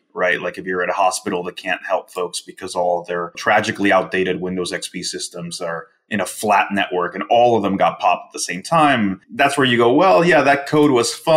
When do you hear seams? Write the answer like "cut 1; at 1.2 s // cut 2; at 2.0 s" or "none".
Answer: cut 1; at 3.4 s // cut 2; at 9.2 s